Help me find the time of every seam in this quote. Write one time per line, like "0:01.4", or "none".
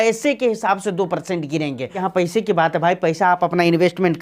0:02.0